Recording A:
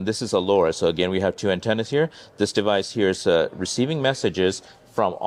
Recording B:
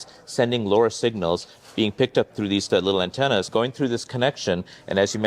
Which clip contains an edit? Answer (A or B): B